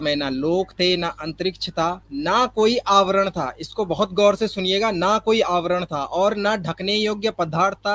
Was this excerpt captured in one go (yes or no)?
no